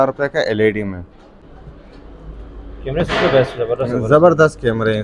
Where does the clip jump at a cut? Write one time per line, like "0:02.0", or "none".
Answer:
0:01.4